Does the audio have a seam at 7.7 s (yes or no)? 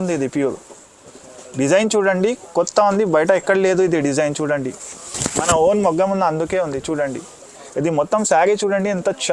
no